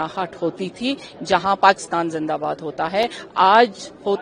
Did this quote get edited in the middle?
no; 0 cuts

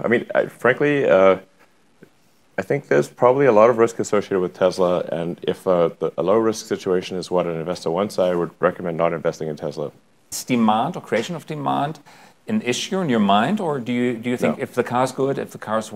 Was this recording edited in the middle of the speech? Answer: yes; 1 cut; at 10.2 s

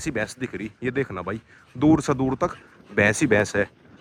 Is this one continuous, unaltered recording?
yes; 0 cuts

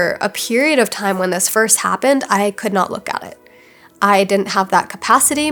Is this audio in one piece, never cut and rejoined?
yes; 0 cuts

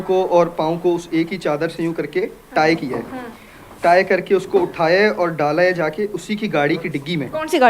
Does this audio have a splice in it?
no; 0 cuts

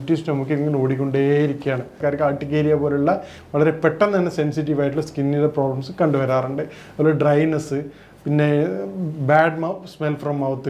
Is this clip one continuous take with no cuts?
no; 1 cut; at 2.0 s

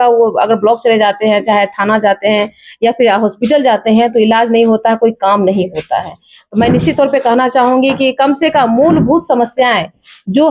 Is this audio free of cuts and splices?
yes; 0 cuts

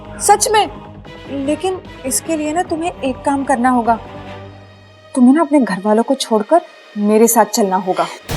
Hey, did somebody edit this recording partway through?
no; 0 cuts

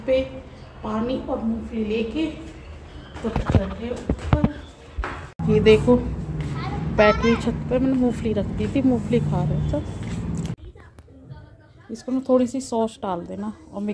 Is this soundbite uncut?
no; 2 cuts; at 5.2 s, 10.5 s

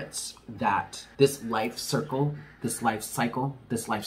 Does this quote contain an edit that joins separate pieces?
yes; 2 cuts; at 1.0 s, 2.5 s

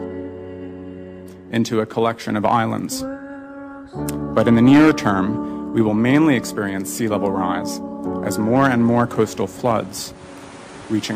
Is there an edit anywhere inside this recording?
no; 0 cuts

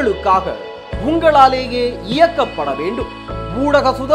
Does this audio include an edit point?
no; 0 cuts

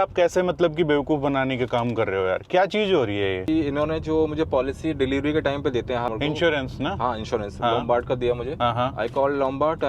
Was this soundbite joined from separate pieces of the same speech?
yes; 3 cuts; at 3.5 s, 6.1 s, 8.5 s

